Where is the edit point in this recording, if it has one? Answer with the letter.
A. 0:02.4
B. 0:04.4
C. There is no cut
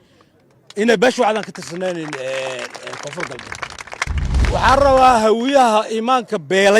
B